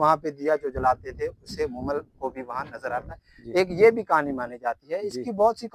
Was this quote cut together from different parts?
no; 0 cuts

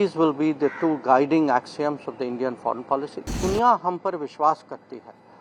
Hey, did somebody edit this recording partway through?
yes; 1 cut; at 3.4 s

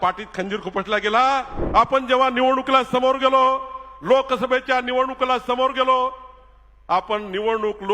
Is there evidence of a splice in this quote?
yes; 1 cut; at 1.6 s

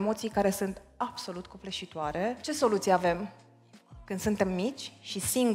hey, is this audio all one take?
no; 1 cut; at 2.4 s

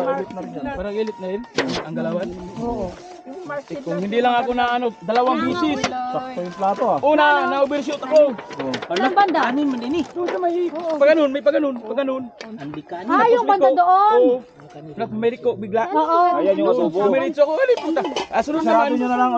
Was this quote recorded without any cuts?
yes; 0 cuts

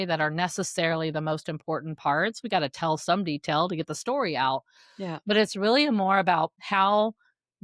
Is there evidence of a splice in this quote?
yes; 1 cut; at 6.6 s

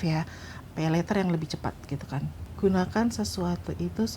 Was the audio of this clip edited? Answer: yes; 1 cut; at 2.4 s

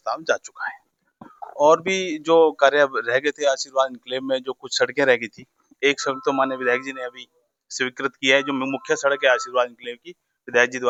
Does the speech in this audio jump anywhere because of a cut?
no; 0 cuts

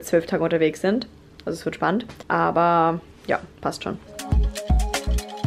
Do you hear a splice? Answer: no; 0 cuts

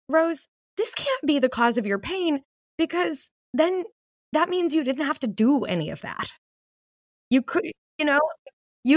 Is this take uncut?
yes; 0 cuts

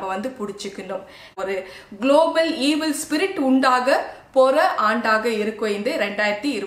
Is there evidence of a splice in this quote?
yes; 1 cut; at 1.4 s

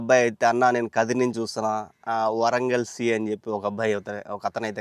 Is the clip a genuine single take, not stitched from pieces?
yes; 0 cuts

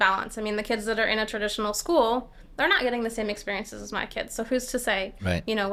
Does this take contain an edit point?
no; 0 cuts

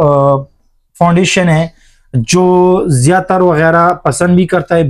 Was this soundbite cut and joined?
no; 0 cuts

